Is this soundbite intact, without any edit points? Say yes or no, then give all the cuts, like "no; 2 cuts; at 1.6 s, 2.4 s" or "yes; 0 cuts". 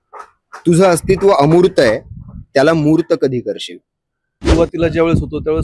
no; 1 cut; at 4.4 s